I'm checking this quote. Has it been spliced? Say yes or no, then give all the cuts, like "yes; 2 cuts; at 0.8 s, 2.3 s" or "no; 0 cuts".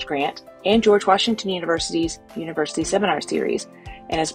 no; 0 cuts